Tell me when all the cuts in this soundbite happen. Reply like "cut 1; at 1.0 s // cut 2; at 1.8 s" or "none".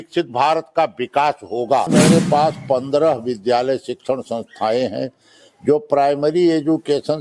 cut 1; at 1.9 s